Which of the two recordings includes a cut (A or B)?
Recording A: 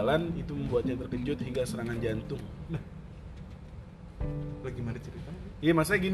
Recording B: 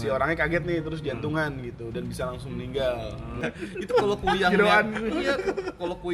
B